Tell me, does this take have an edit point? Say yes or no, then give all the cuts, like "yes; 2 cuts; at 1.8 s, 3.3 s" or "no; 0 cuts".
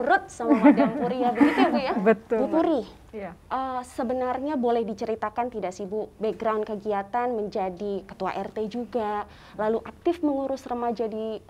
no; 0 cuts